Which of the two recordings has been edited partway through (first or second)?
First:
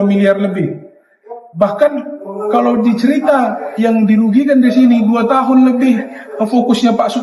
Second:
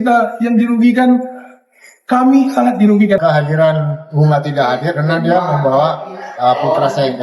second